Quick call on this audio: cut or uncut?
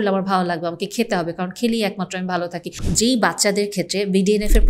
cut